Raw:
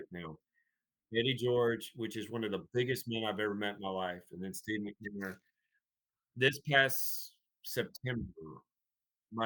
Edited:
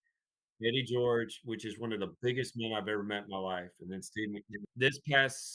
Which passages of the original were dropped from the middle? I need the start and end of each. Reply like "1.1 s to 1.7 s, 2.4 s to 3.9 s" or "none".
5.1 s to 6.2 s